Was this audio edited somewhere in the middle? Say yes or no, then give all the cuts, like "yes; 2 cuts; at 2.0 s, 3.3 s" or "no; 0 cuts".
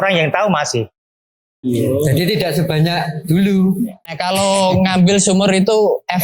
yes; 1 cut; at 4.0 s